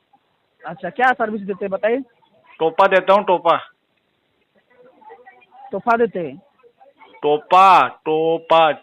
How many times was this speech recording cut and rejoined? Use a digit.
0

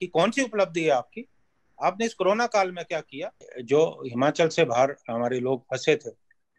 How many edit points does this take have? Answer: 1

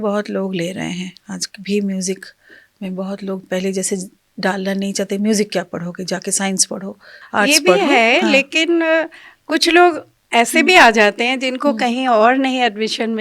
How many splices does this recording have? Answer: 1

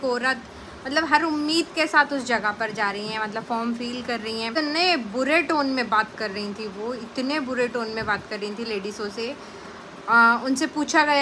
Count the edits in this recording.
1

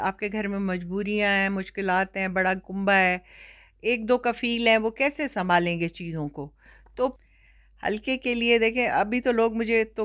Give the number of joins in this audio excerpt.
1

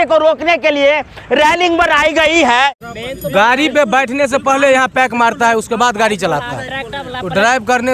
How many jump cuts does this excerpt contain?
1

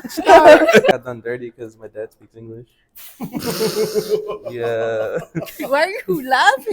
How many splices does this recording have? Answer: 1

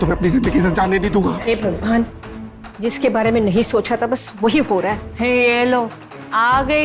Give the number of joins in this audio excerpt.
1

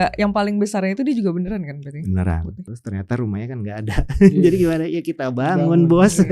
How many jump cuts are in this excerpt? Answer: 1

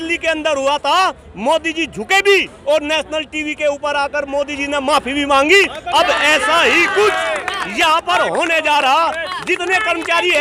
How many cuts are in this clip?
0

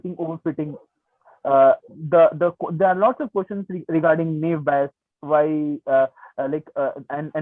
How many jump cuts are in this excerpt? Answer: 0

